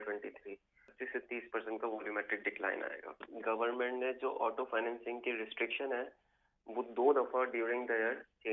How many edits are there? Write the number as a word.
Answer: two